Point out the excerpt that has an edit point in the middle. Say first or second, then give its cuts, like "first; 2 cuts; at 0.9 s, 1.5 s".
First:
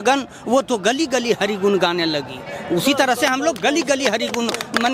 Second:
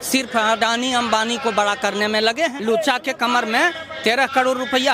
second; 1 cut; at 2.6 s